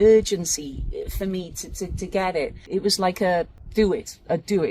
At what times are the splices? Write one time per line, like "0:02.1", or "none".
0:02.6
0:03.6